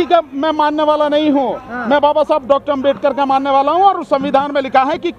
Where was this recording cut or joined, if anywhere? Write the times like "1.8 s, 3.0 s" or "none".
none